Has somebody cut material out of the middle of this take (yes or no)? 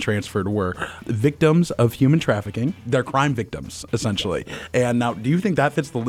yes